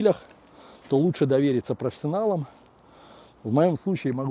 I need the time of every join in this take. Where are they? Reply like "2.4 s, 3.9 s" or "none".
none